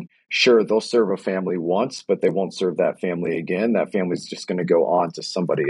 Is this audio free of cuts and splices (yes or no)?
yes